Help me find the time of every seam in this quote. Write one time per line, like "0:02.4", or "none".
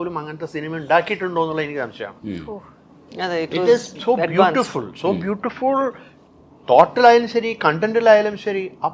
none